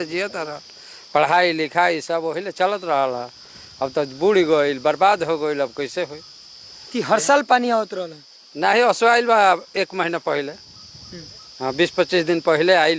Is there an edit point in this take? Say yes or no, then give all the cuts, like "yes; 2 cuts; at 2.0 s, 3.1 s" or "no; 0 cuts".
no; 0 cuts